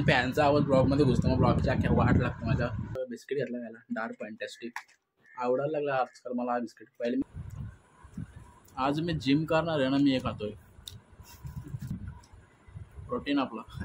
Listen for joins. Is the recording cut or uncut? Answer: cut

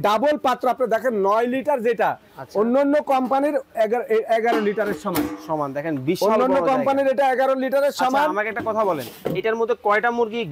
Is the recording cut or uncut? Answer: uncut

